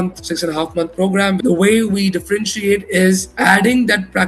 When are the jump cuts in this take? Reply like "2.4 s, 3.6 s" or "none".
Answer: 1.4 s